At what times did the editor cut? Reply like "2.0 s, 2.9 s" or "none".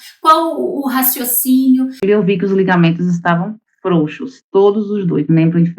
2.0 s